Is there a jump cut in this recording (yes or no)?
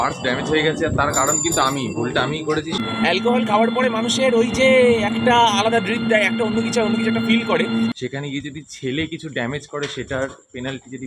yes